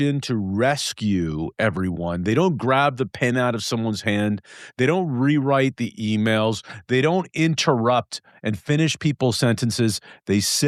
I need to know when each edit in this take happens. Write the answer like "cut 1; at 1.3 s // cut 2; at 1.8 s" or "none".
none